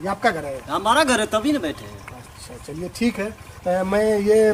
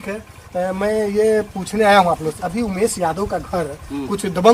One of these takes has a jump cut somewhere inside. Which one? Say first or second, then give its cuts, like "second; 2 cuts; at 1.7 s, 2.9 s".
second; 1 cut; at 2.3 s